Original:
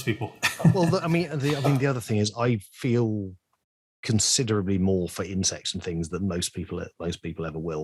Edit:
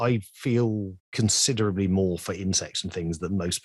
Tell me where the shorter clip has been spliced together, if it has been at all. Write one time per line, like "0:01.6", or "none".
0:01.0